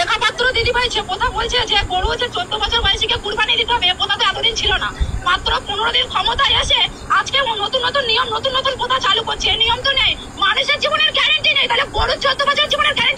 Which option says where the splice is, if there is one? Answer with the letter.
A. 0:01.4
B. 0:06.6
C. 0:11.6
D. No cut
D